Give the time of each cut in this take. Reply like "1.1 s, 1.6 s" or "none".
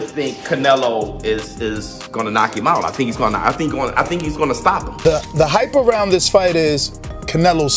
5.0 s